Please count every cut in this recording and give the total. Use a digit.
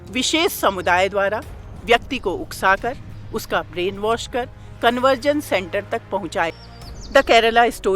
1